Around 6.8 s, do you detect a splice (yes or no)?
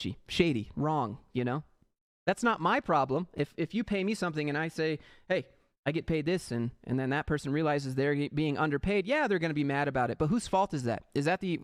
no